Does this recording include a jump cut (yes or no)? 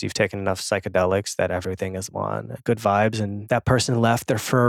yes